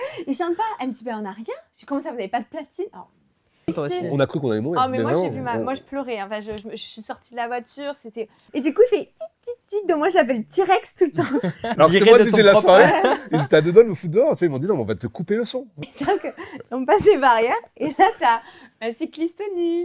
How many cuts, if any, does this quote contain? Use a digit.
4